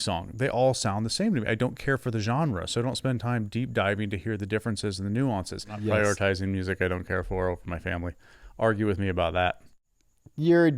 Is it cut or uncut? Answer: cut